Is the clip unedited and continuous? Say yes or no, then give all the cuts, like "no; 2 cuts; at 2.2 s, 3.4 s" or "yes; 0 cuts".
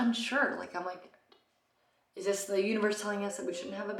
yes; 0 cuts